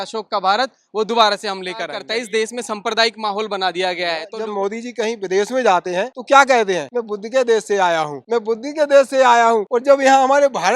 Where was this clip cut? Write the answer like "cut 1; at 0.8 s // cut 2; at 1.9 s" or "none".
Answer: cut 1; at 2.0 s // cut 2; at 4.3 s // cut 3; at 6.2 s // cut 4; at 6.9 s // cut 5; at 8.2 s // cut 6; at 9.7 s